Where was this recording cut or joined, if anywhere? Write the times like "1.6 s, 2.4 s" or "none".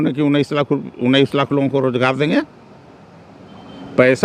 none